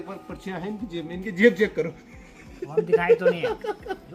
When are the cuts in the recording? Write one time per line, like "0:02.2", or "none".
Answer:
none